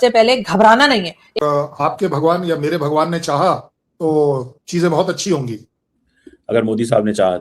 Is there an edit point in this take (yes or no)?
yes